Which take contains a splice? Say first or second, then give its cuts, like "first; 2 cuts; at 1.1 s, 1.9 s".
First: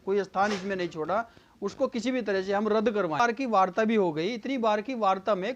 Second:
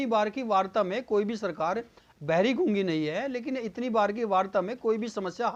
first; 1 cut; at 3.2 s